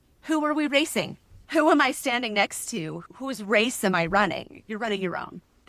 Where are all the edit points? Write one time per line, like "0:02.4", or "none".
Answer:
0:01.4